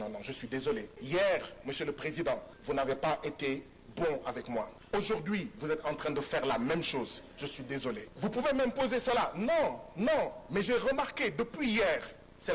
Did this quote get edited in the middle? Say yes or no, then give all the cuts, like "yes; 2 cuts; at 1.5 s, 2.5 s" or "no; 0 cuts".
yes; 4 cuts; at 0.9 s, 2.5 s, 4.8 s, 8.1 s